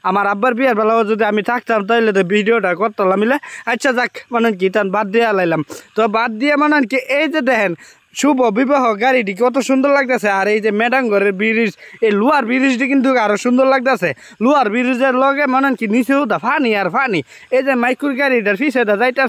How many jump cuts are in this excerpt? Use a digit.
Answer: 0